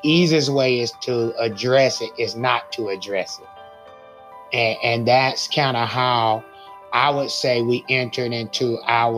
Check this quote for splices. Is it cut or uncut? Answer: cut